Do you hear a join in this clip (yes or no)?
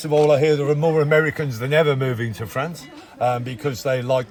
no